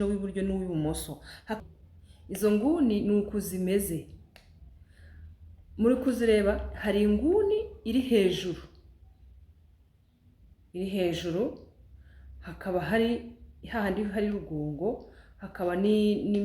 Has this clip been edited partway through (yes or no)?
yes